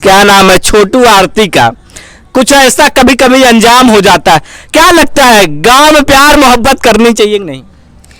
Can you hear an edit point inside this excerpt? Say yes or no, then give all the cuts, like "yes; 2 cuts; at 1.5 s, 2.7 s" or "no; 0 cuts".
no; 0 cuts